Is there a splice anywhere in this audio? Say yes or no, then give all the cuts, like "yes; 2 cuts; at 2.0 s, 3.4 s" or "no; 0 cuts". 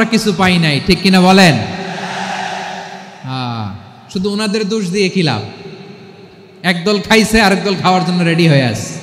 no; 0 cuts